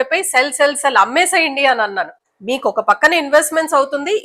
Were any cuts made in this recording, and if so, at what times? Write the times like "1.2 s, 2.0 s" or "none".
2.2 s